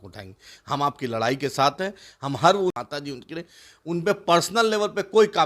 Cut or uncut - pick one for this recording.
cut